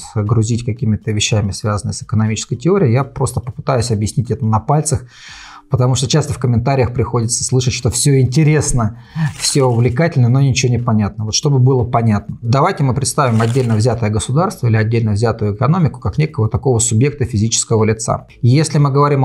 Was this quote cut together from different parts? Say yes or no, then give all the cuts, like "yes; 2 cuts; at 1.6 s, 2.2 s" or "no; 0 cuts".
no; 0 cuts